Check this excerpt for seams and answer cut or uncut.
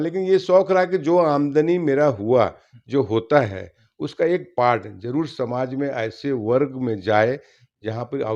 uncut